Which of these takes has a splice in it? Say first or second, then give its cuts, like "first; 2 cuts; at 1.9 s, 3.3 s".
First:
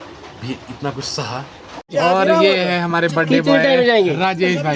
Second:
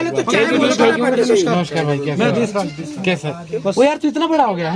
first; 1 cut; at 1.9 s